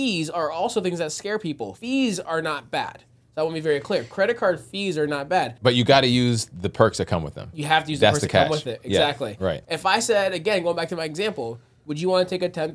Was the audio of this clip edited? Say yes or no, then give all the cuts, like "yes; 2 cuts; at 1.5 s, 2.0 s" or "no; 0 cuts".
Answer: yes; 3 cuts; at 1.7 s, 5.5 s, 9.6 s